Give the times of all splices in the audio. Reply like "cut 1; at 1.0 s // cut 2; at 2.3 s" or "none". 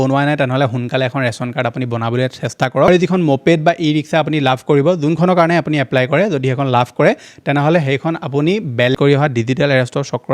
cut 1; at 2.9 s // cut 2; at 8.9 s